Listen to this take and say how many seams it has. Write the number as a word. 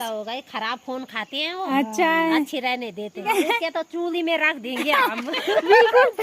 one